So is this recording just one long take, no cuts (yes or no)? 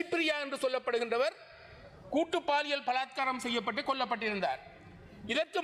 yes